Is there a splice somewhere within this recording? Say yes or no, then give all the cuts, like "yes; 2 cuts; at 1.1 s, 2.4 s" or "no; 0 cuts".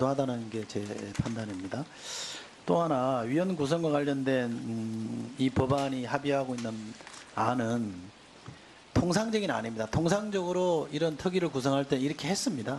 yes; 1 cut; at 4.2 s